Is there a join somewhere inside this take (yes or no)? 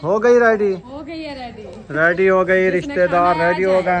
yes